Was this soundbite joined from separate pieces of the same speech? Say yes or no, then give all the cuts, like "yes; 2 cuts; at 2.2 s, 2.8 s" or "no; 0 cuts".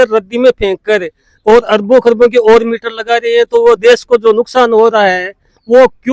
no; 0 cuts